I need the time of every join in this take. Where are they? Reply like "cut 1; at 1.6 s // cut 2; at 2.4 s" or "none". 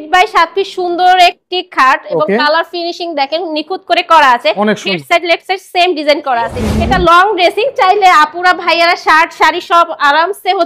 cut 1; at 6.6 s